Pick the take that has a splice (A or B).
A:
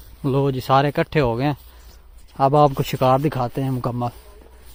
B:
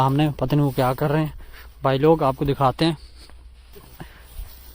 B